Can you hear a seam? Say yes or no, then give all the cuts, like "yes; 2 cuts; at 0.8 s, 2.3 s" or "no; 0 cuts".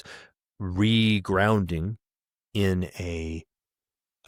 no; 0 cuts